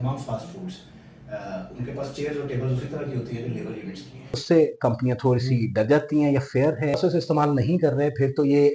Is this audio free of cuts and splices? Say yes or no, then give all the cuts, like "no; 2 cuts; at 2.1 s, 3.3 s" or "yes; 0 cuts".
no; 2 cuts; at 4.4 s, 6.9 s